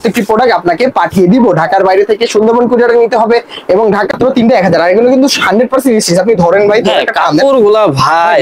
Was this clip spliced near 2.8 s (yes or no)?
no